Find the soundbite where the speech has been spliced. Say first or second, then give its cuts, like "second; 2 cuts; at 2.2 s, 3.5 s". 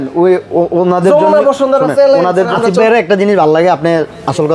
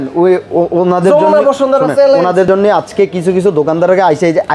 first; 1 cut; at 2.5 s